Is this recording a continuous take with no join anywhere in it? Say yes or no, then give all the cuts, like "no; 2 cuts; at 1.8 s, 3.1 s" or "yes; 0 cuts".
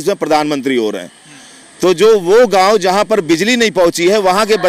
yes; 0 cuts